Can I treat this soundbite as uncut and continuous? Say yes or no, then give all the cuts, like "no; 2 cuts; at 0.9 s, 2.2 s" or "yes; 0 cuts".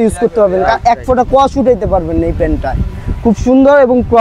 yes; 0 cuts